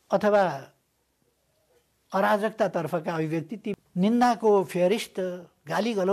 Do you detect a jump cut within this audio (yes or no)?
yes